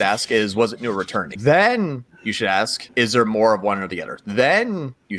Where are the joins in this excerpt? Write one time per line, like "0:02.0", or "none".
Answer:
0:01.2
0:02.8